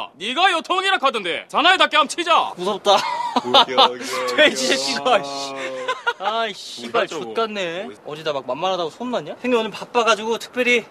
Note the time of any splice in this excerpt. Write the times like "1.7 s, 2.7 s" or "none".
none